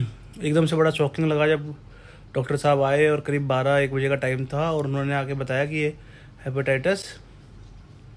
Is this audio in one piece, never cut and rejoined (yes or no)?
yes